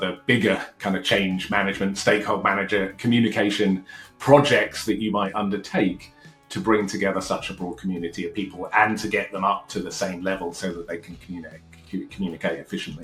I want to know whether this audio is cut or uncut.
uncut